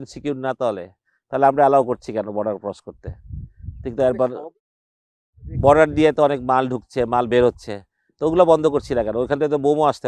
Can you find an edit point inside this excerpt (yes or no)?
no